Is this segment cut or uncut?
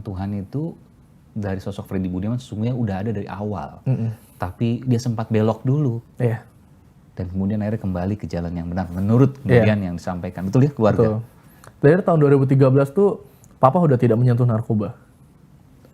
uncut